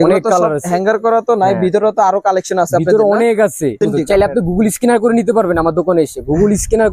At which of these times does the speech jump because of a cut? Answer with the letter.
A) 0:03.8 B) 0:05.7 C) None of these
A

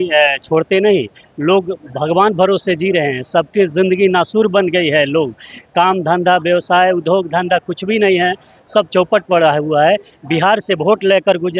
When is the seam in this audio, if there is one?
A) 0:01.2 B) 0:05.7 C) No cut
C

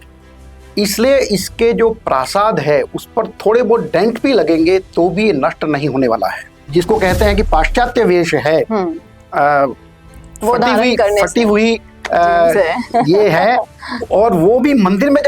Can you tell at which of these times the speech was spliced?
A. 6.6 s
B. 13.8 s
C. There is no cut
A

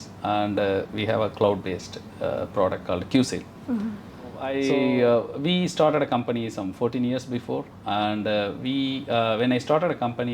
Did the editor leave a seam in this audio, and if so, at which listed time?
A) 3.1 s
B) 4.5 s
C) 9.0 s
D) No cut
B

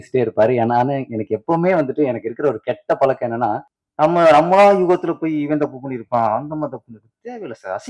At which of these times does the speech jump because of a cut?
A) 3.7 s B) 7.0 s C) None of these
A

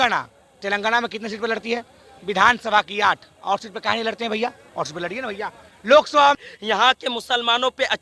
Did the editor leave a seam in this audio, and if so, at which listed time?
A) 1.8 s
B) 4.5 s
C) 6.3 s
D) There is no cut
C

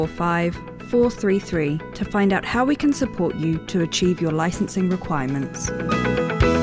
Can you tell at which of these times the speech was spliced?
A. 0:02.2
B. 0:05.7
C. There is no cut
B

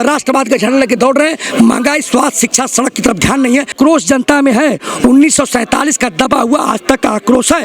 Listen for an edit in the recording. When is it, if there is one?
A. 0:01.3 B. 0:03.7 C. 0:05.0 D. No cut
B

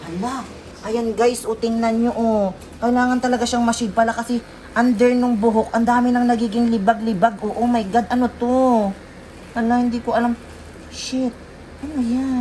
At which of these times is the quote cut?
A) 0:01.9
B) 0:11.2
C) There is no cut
C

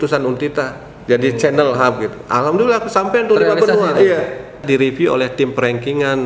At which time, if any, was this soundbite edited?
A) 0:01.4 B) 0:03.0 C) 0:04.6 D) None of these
C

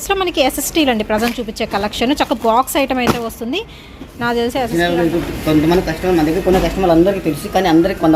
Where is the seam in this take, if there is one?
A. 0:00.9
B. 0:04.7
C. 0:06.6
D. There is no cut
B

